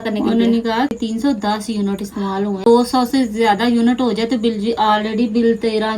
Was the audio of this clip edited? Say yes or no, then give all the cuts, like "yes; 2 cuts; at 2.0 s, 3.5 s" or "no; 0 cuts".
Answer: yes; 2 cuts; at 0.9 s, 2.7 s